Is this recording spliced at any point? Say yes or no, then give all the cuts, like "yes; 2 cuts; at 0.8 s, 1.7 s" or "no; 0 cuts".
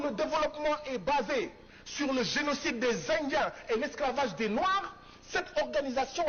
no; 0 cuts